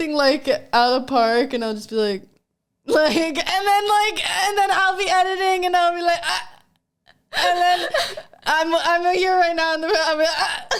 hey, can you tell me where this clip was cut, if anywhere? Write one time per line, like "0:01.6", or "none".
none